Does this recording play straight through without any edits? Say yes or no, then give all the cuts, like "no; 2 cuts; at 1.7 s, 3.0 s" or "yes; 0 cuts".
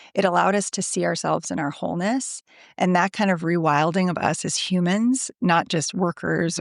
yes; 0 cuts